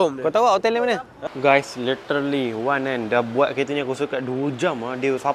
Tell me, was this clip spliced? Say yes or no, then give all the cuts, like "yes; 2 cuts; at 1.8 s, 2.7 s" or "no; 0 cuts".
yes; 1 cut; at 1.3 s